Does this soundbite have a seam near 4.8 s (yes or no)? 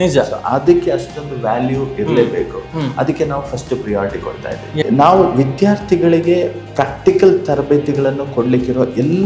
yes